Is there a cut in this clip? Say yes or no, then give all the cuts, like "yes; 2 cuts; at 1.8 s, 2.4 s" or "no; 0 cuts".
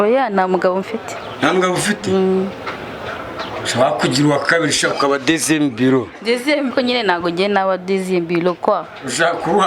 yes; 1 cut; at 6.7 s